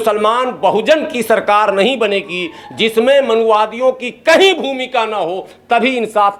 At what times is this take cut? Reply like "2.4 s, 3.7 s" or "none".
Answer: none